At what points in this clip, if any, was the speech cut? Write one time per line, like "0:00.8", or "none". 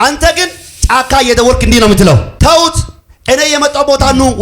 0:02.3